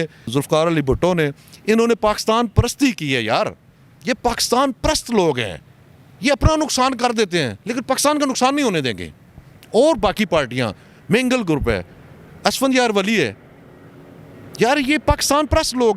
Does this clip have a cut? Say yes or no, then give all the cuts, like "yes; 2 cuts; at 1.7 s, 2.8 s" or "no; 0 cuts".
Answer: no; 0 cuts